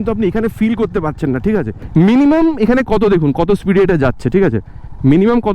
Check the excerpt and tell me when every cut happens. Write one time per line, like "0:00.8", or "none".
0:01.8